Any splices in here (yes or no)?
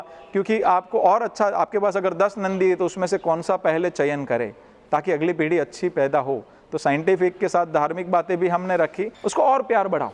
yes